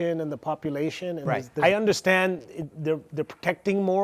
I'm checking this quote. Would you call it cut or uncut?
cut